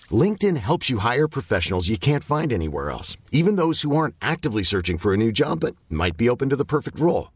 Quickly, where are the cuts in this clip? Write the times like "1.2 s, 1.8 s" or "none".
none